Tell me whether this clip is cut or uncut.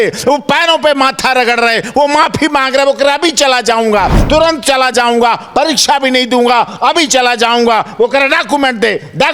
uncut